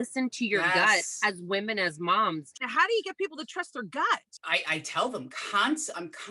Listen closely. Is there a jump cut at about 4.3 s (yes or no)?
yes